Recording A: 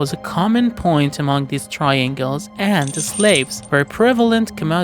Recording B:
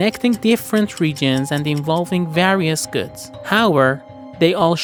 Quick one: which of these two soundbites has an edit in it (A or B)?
A